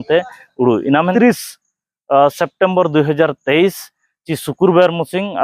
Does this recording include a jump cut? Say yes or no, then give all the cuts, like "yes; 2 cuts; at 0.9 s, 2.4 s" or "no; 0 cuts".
yes; 1 cut; at 1.1 s